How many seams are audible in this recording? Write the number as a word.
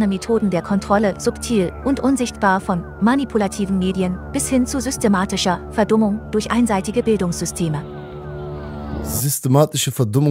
zero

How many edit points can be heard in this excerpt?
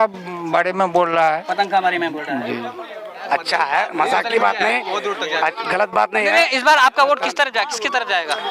one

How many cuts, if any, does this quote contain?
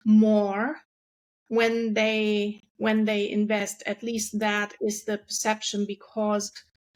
zero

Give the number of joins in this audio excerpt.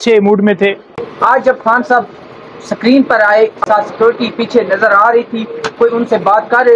two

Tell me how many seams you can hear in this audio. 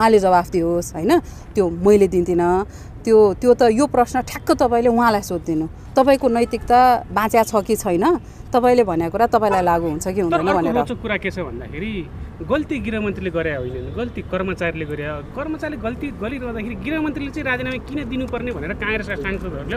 zero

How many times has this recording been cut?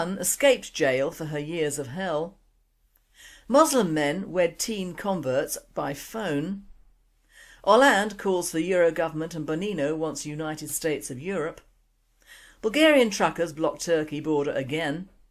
one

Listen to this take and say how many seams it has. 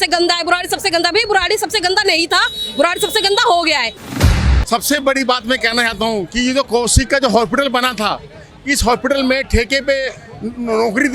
one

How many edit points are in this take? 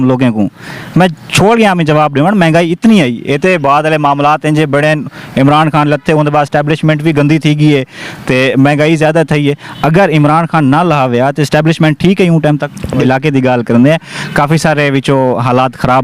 one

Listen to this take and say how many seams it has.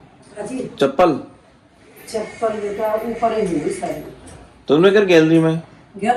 zero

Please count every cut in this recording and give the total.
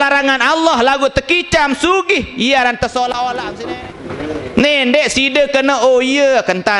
one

